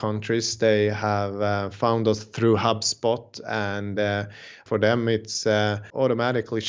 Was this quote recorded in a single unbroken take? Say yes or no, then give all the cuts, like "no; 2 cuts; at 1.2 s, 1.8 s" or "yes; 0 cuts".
no; 2 cuts; at 4.6 s, 5.8 s